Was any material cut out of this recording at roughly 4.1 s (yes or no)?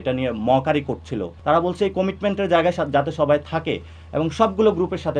no